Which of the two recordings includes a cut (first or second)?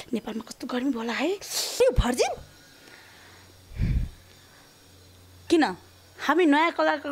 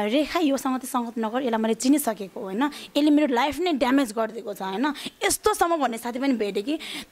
first